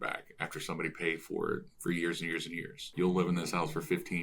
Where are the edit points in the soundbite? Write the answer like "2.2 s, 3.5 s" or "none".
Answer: 2.9 s